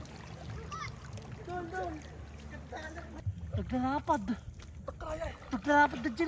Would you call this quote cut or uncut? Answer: cut